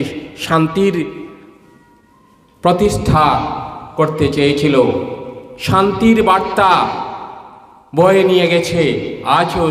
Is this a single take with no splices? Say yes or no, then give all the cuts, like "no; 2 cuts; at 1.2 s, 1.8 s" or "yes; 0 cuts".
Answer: yes; 0 cuts